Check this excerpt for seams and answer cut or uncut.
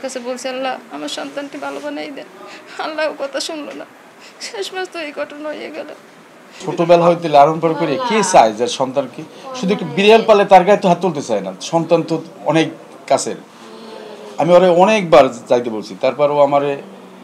uncut